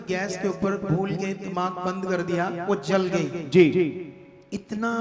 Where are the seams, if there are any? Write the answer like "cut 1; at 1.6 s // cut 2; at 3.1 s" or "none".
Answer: none